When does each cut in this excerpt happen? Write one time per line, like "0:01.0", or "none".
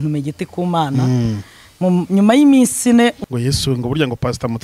0:03.2